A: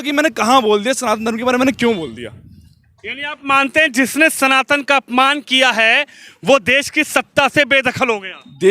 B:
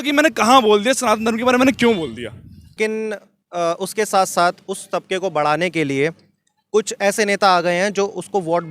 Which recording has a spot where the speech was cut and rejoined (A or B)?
B